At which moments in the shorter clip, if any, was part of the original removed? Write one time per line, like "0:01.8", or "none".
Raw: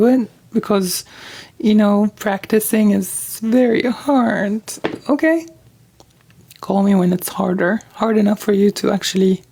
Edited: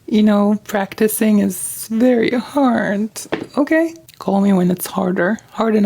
0:04.1